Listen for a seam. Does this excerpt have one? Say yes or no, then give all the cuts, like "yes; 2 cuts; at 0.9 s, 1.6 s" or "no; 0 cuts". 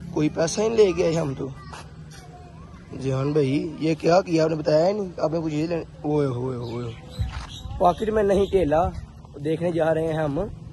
no; 0 cuts